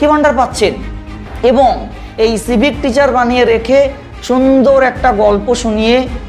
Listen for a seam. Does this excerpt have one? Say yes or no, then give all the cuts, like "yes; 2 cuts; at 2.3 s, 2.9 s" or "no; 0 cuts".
yes; 1 cut; at 1.2 s